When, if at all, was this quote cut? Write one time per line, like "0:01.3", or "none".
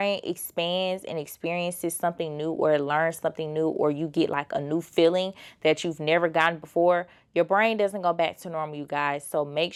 none